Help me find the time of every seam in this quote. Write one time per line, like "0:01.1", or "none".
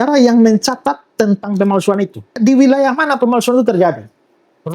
0:02.4